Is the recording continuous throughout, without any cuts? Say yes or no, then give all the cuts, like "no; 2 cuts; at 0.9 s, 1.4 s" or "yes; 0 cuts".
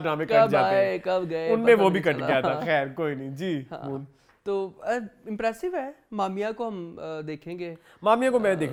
yes; 0 cuts